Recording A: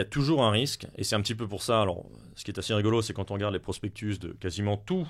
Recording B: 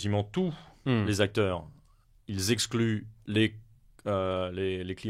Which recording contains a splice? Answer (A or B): B